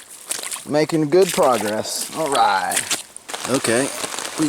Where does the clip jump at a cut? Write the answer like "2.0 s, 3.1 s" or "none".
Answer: 3.3 s